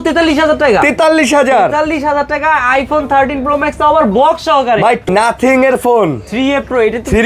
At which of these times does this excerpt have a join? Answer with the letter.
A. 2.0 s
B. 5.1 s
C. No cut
B